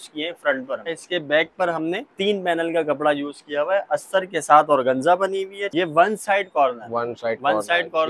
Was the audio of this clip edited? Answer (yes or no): yes